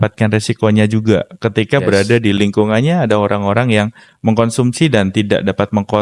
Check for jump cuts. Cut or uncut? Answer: uncut